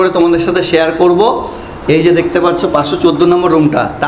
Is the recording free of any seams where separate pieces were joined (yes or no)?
yes